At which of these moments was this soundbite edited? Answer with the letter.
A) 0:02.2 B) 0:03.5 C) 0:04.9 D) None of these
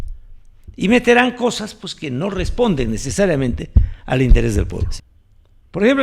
C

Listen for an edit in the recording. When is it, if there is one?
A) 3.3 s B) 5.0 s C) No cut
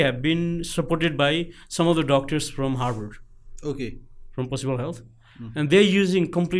C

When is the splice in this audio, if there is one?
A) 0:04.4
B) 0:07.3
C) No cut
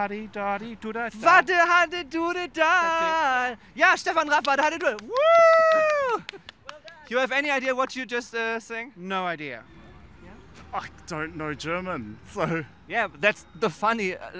B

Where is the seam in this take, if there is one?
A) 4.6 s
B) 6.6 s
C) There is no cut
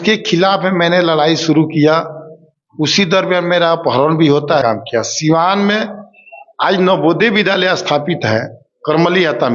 A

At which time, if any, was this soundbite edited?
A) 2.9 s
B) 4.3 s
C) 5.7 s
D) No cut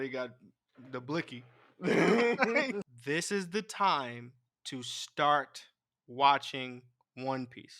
A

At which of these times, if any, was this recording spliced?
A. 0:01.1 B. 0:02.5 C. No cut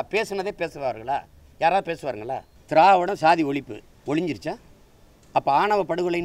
B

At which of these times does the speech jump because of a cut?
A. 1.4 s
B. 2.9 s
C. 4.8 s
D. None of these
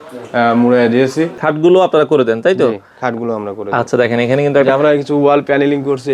A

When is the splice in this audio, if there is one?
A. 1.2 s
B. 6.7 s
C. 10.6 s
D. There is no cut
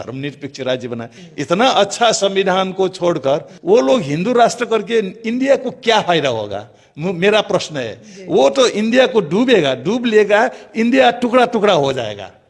A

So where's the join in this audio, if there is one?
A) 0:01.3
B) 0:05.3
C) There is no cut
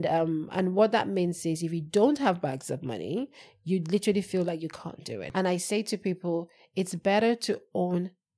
B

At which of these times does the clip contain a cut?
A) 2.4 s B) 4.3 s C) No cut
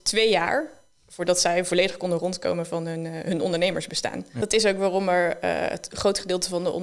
B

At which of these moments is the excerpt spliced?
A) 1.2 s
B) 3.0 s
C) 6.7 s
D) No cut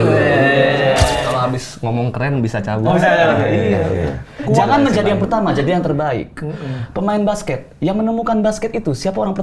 A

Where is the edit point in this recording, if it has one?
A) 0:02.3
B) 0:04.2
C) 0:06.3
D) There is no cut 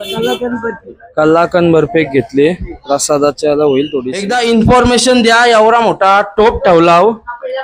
B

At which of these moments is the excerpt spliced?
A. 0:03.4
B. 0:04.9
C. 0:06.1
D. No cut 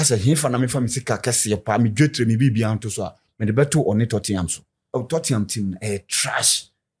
B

